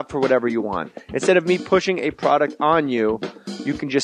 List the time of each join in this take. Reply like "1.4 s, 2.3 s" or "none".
1.6 s

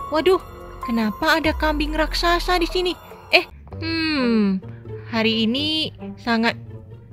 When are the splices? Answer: 3.6 s

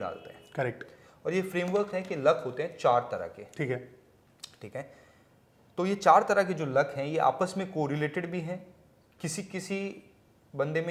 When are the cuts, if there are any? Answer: none

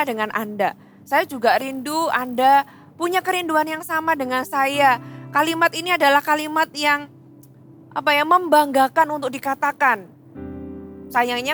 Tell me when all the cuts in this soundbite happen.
none

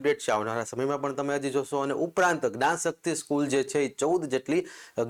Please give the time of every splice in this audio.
none

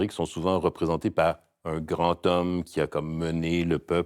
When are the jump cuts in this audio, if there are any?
none

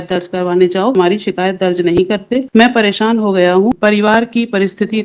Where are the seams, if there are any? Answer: 0.9 s, 2.5 s, 3.7 s

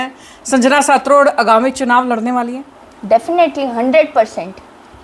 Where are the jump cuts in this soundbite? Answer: none

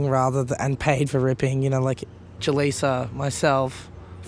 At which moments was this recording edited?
2.3 s

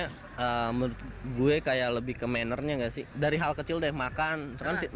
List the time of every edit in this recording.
3.1 s

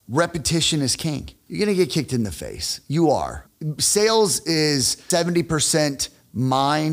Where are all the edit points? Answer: 1.4 s, 3.4 s, 5.0 s

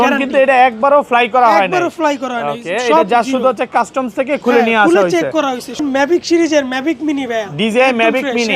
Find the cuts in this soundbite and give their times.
5.8 s

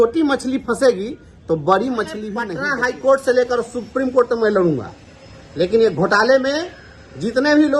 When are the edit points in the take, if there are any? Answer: 2.6 s

